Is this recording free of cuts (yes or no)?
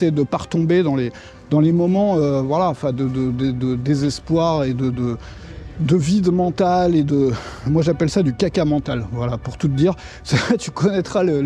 yes